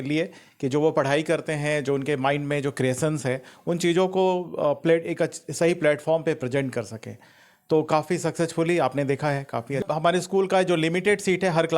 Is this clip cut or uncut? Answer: cut